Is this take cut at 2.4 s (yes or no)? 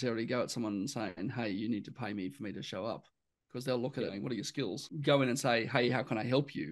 no